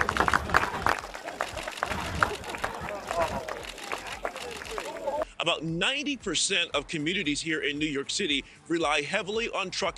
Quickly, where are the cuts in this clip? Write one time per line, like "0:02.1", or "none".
none